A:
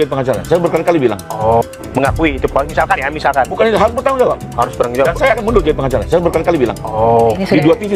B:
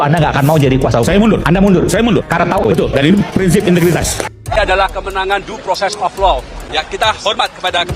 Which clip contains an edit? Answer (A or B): B